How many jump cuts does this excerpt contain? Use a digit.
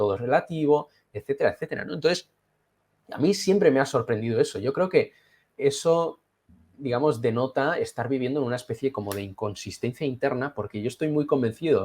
1